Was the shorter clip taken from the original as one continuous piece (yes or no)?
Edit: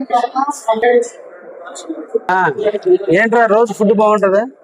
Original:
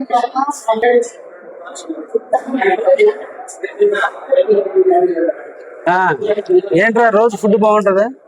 no